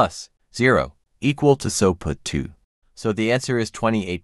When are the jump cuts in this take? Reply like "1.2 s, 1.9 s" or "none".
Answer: 1.0 s